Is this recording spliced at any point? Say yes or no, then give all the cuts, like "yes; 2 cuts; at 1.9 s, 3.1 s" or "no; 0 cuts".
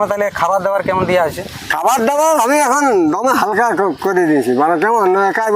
no; 0 cuts